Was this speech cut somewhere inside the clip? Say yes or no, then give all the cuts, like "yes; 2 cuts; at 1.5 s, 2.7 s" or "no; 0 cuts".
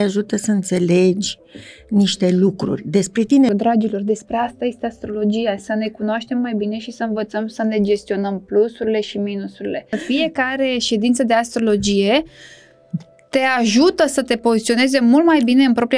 yes; 2 cuts; at 3.5 s, 10.0 s